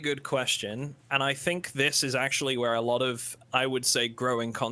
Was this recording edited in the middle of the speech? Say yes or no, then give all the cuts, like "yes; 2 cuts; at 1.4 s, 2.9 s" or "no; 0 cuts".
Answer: no; 0 cuts